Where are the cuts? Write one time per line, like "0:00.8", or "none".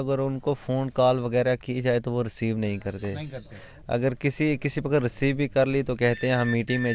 none